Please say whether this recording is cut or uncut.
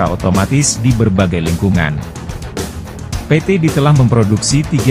uncut